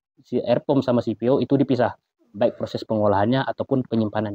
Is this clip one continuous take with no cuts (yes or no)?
yes